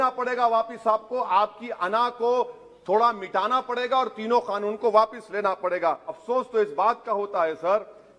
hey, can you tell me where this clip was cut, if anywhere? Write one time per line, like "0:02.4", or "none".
0:06.2

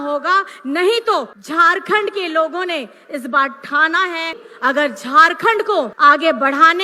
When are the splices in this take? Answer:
0:01.4
0:04.4
0:05.9

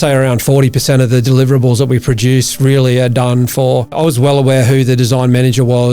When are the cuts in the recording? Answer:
0:03.9

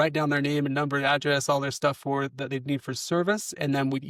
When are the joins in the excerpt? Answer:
none

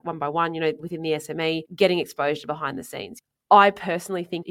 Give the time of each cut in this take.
0:01.3
0:03.3

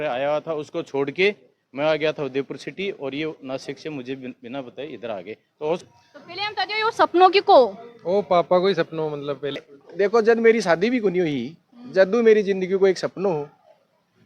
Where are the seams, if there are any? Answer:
0:05.8
0:09.7

